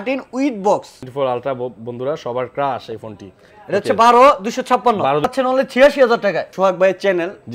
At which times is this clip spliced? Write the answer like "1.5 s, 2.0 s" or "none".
1.0 s, 5.2 s, 6.5 s